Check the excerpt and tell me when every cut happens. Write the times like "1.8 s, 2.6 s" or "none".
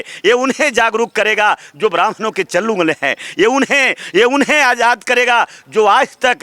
none